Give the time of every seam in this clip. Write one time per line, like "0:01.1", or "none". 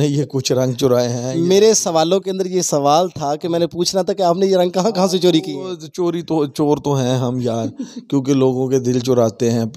none